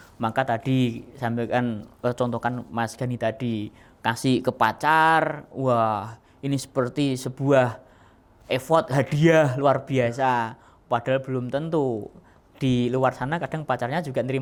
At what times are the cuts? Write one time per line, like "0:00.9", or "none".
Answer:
none